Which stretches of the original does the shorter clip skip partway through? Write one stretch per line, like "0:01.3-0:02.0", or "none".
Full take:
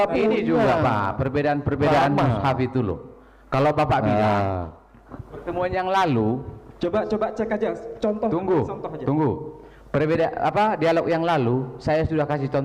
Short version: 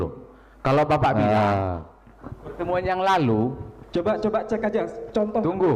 none